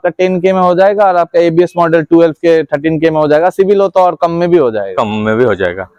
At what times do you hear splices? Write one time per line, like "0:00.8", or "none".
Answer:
none

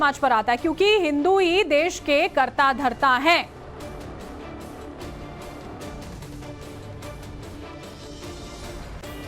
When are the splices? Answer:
0:01.5

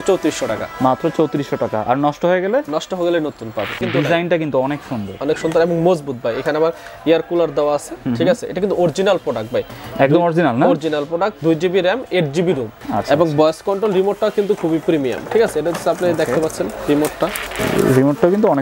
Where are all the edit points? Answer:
0:03.8
0:12.7
0:17.5

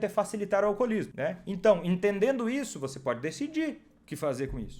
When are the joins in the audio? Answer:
0:01.1

